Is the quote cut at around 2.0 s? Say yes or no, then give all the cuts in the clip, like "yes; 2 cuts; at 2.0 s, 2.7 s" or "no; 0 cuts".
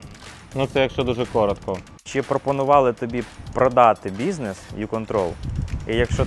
yes; 1 cut; at 2.0 s